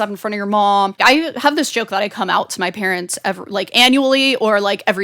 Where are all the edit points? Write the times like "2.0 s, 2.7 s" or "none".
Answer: 1.0 s